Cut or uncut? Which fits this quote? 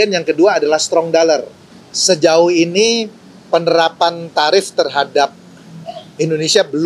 uncut